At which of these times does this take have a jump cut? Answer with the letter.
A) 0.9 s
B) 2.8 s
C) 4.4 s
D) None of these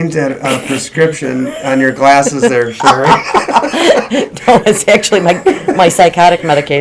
D